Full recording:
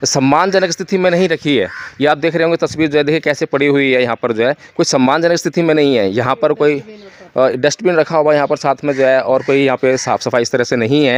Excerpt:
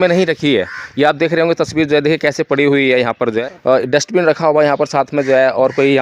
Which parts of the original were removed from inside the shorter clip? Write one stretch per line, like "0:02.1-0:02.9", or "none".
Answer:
0:04.5-0:07.2